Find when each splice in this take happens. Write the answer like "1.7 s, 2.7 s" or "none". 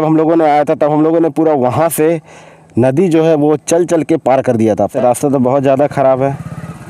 4.9 s

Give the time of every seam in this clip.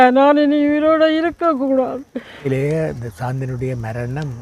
2.5 s

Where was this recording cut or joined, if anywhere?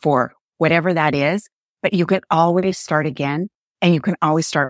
none

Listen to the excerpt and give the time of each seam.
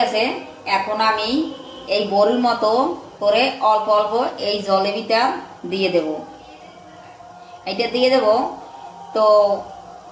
none

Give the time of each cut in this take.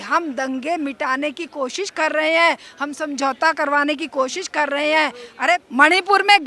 5.5 s

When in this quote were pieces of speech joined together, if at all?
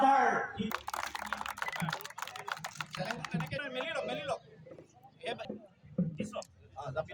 none

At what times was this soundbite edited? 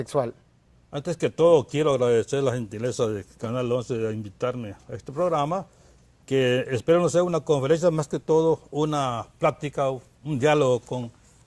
1.3 s

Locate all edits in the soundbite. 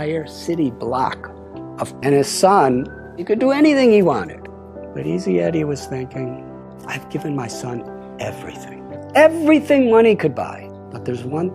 1.9 s

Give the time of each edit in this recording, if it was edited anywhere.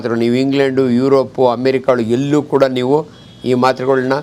none

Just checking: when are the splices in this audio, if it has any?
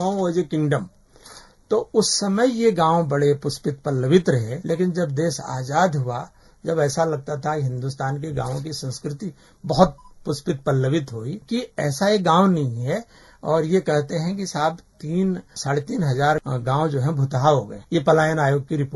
4.5 s, 11.4 s, 15.5 s, 16.4 s, 17.8 s

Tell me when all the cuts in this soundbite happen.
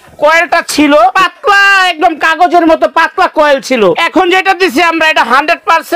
1.1 s, 4.0 s

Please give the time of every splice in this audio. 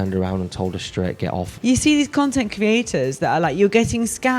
1.5 s

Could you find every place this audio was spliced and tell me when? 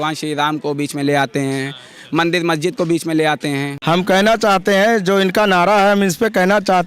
3.7 s

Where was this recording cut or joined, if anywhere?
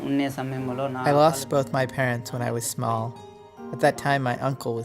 1.0 s

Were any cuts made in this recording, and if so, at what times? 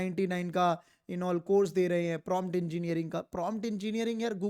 none

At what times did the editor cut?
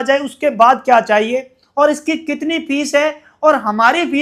none

